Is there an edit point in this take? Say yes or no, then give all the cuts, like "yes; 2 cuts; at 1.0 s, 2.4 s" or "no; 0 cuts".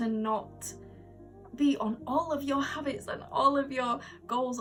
no; 0 cuts